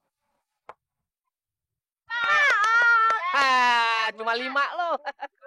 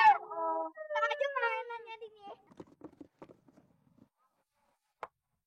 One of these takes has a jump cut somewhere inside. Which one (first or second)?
second